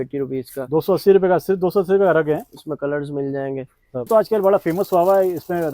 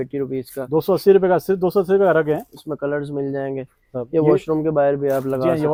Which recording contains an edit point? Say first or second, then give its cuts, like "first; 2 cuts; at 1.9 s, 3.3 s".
first; 1 cut; at 4.1 s